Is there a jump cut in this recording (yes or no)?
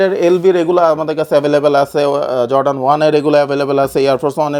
no